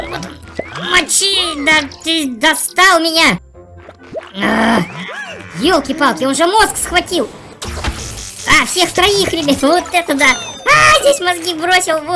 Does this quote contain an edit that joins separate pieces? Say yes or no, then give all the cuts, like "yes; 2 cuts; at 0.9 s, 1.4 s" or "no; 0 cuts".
no; 0 cuts